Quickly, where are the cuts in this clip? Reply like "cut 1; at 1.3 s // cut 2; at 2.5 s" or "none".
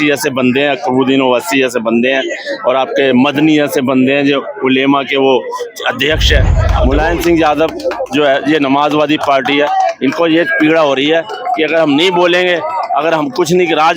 cut 1; at 6.7 s